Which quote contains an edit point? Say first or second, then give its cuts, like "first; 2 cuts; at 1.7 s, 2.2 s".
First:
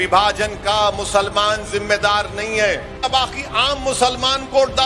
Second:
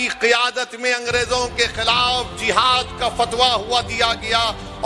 first; 1 cut; at 3.0 s